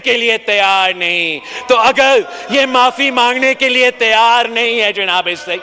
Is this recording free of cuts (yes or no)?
yes